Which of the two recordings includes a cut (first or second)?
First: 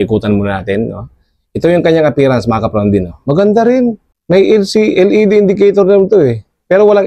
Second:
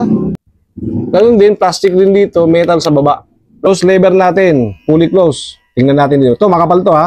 second